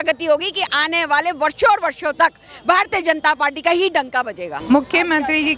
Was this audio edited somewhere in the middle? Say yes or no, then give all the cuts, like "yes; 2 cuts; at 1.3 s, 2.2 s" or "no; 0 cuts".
yes; 1 cut; at 4.5 s